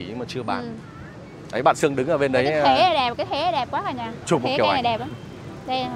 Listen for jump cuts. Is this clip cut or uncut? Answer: uncut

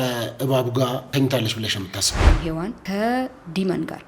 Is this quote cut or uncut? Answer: cut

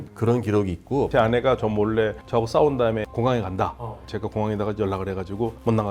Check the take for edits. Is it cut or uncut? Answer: cut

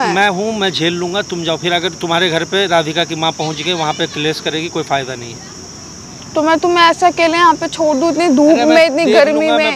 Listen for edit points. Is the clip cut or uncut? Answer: uncut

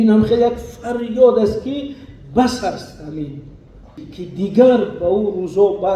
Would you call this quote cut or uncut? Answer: cut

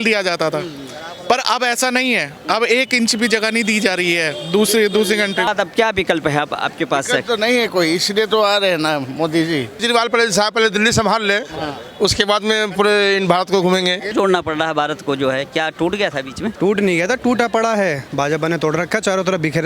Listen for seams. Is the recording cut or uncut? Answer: cut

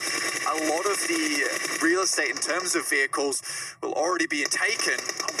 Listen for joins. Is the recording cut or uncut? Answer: uncut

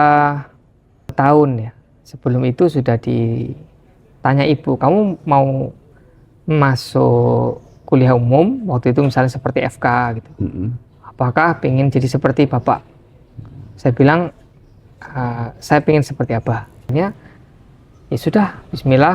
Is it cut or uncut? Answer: cut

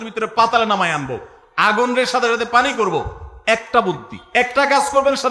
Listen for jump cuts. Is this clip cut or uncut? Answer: uncut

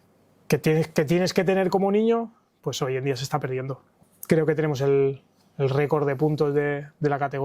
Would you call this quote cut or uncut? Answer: cut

